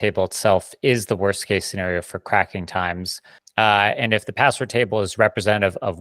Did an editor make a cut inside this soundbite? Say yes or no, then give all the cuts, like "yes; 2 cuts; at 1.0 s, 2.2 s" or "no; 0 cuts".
yes; 1 cut; at 3.4 s